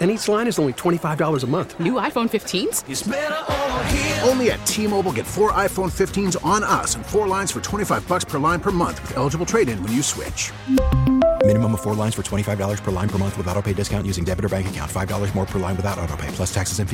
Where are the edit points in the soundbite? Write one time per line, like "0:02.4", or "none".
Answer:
none

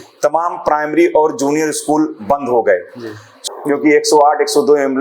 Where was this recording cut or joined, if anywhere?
0:03.3

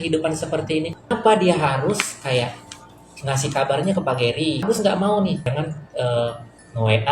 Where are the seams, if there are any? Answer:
0:01.1
0:04.6
0:05.5

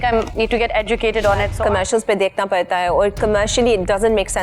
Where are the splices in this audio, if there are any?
0:01.5

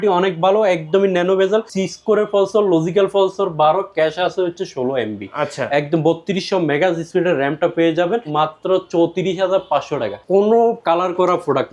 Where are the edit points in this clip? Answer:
0:01.8
0:08.3
0:10.2

